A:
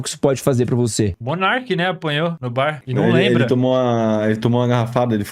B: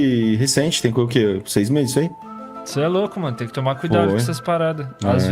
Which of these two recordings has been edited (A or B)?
A